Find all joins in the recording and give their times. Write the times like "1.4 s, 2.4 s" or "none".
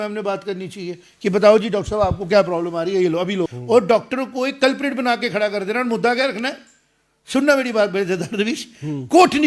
3.6 s